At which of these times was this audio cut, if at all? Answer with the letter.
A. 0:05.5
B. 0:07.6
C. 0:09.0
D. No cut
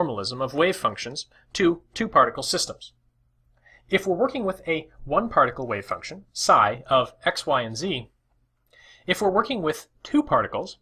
A